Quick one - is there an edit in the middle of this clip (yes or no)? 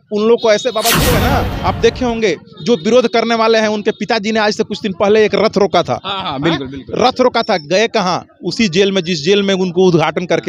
yes